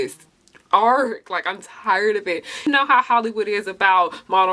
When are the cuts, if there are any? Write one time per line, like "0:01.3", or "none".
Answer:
0:02.6